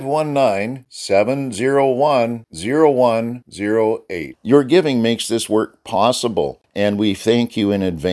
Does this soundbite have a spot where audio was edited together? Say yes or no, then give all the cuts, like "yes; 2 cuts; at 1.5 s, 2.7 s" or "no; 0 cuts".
yes; 1 cut; at 6.6 s